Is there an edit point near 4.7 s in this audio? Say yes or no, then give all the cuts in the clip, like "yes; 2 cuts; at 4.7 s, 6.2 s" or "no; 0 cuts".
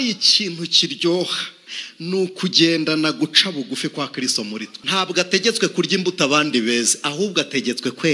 yes; 1 cut; at 4.7 s